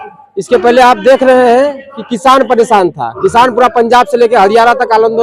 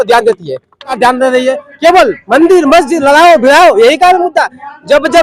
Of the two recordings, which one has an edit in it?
second; 1 cut; at 1.0 s

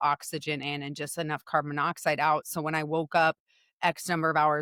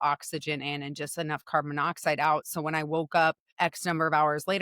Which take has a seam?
second; 1 cut; at 3.5 s

